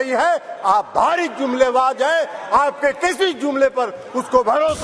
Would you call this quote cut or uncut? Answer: uncut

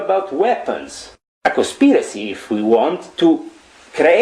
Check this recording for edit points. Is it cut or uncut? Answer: cut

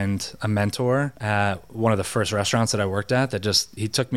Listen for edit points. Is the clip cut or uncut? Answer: uncut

